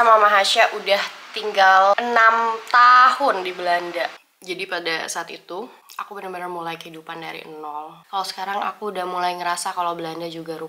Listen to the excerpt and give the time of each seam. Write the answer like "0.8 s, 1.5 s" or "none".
2.0 s, 4.1 s, 8.0 s